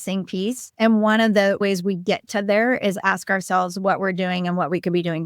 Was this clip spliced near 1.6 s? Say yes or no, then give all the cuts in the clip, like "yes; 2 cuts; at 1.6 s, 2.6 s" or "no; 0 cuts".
yes; 1 cut; at 1.6 s